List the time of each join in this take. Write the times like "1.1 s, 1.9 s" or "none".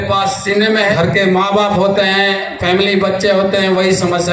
0.9 s